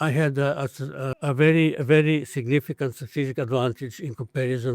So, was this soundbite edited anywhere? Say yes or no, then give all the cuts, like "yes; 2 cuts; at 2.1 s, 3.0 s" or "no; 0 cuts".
yes; 1 cut; at 1.1 s